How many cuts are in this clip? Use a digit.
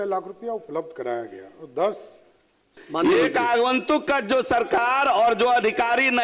1